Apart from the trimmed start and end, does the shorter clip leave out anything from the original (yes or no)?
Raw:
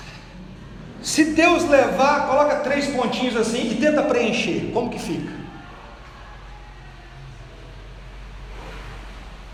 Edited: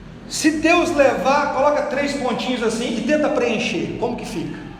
no